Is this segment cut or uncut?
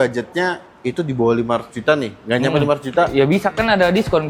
uncut